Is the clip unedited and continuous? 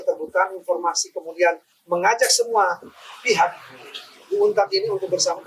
yes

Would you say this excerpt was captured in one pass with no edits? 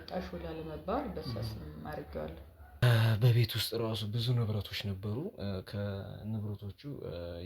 no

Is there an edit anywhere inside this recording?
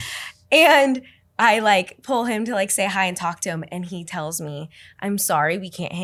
no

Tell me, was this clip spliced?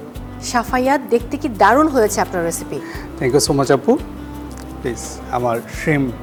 no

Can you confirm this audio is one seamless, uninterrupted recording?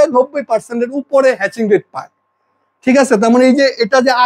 yes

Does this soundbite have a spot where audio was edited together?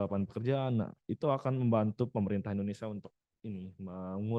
no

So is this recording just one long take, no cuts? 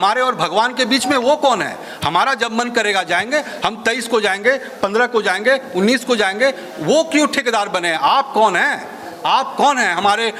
yes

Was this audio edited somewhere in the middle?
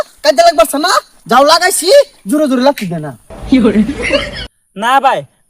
yes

